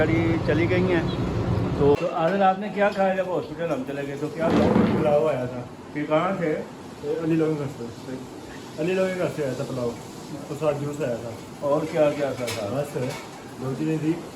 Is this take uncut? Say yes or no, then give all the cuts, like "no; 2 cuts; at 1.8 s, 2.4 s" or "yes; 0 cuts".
no; 1 cut; at 1.9 s